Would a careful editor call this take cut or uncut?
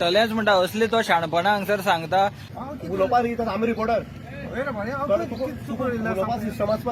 cut